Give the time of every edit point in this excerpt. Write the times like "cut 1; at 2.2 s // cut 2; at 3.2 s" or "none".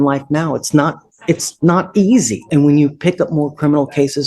cut 1; at 2.4 s